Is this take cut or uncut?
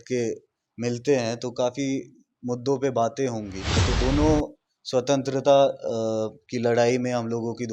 cut